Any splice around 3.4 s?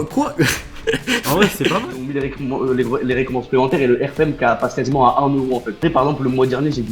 no; 2 cuts; at 1.8 s, 5.8 s

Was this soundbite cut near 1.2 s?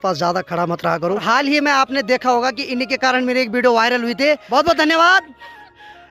yes; 2 cuts; at 1.2 s, 4.4 s

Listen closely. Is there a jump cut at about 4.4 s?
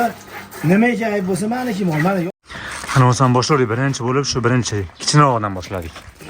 no; 1 cut; at 2.3 s

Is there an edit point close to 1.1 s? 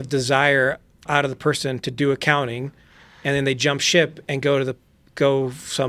yes; 1 cut; at 1.1 s

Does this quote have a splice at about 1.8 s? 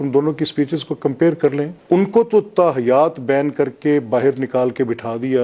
yes; 1 cut; at 1.8 s

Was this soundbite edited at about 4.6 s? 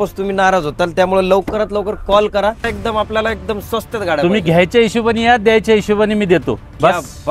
no; 1 cut; at 2.7 s

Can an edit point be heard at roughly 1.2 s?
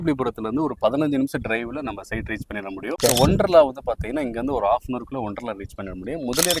no; 1 cut; at 3.0 s

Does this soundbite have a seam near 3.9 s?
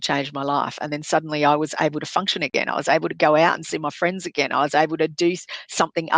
no; 0 cuts

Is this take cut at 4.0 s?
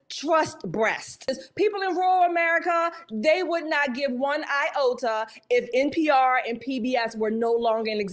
no; 1 cut; at 1.3 s

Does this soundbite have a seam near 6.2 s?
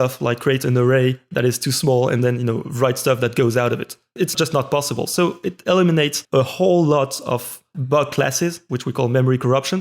yes; 2 cuts; at 4.3 s, 6.2 s

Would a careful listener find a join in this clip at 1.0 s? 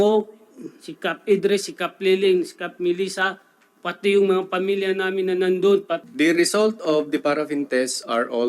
no; 1 cut; at 6.0 s

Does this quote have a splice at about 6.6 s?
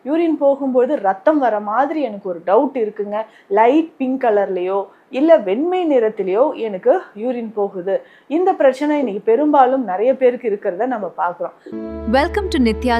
no; 1 cut; at 11.7 s

